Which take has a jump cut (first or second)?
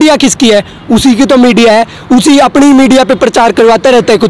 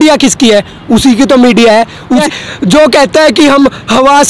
second